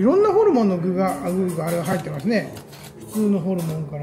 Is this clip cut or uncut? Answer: uncut